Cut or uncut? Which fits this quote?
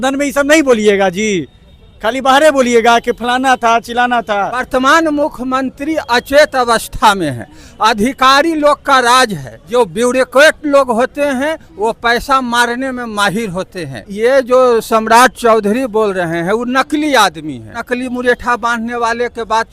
cut